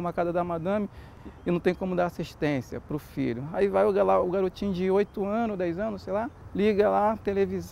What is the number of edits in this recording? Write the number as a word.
two